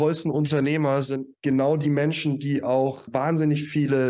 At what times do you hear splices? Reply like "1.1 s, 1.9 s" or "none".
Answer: 1.3 s, 3.1 s